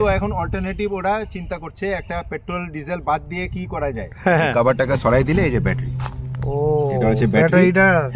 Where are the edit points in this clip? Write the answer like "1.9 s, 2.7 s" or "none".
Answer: 4.5 s